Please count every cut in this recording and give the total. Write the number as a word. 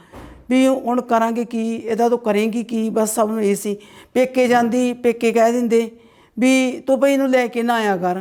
zero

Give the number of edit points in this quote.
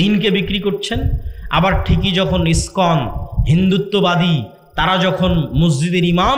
zero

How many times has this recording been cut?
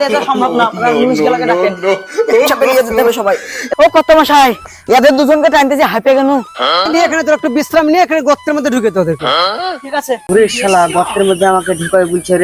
two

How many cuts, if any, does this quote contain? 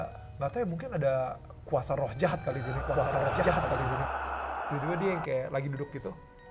one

